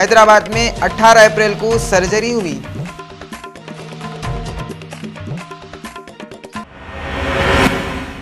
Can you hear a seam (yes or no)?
yes